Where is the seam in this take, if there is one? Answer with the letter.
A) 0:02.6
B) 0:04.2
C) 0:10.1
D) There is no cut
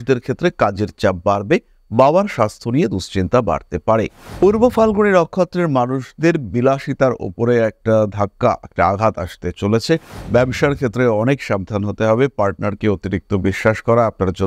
B